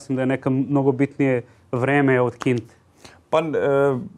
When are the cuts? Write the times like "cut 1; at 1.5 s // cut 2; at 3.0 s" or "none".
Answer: none